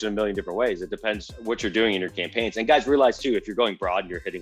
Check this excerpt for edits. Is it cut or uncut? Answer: cut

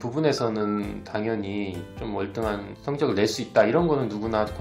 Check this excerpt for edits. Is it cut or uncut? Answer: cut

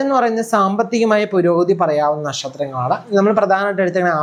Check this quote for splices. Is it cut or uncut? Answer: uncut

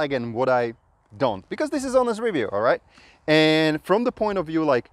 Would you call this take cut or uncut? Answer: uncut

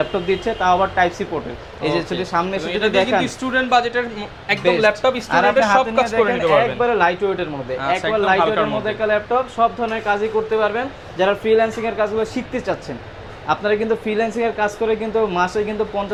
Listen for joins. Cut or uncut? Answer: uncut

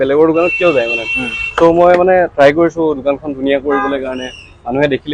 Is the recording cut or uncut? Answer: uncut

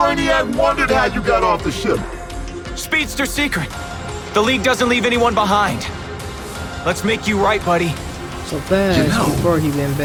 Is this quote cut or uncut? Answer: uncut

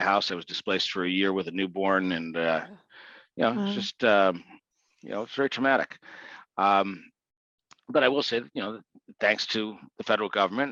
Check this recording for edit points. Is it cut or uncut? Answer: uncut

